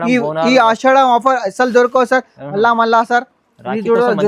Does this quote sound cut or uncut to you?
uncut